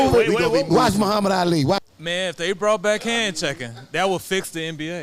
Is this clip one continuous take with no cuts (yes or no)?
no